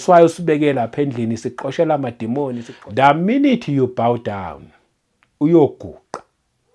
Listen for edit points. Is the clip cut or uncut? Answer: cut